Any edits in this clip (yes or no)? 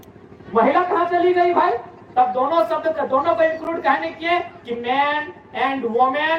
no